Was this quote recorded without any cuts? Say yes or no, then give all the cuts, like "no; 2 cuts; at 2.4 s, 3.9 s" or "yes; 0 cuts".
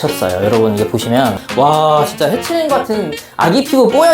no; 1 cut; at 1.4 s